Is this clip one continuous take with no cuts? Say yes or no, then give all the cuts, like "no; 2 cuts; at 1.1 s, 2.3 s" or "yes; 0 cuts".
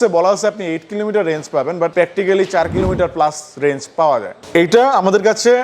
no; 2 cuts; at 1.9 s, 4.4 s